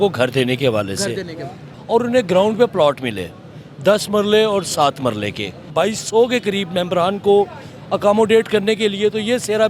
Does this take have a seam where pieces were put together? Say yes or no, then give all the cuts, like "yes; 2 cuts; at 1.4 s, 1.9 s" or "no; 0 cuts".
yes; 2 cuts; at 1.6 s, 5.7 s